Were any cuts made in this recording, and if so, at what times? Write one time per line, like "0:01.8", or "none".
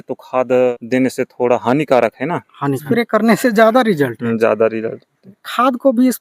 0:00.7
0:02.8